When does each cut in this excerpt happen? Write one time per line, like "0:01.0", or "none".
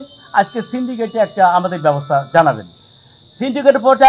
none